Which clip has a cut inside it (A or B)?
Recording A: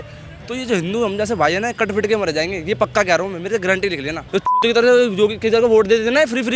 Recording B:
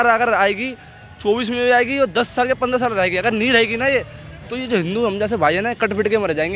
A